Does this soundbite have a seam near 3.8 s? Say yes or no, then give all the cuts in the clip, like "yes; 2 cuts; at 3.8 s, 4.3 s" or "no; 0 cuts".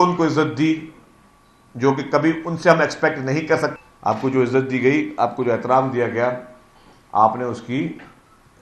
yes; 1 cut; at 3.8 s